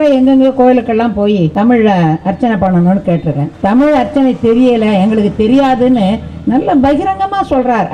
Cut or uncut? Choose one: cut